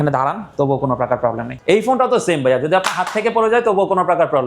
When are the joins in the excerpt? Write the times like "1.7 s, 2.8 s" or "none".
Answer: 1.5 s